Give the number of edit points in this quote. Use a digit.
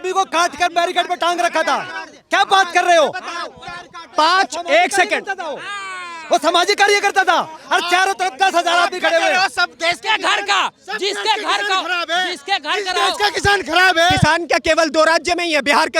1